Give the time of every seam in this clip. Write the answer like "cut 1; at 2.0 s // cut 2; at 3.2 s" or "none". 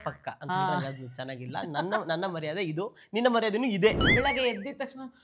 cut 1; at 4.0 s